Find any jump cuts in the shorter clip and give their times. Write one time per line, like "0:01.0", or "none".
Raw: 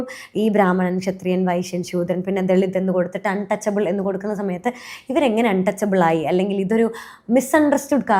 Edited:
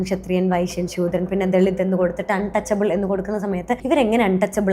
0:03.8